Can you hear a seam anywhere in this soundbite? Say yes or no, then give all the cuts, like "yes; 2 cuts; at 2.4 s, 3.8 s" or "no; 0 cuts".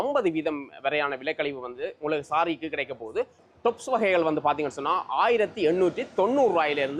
no; 0 cuts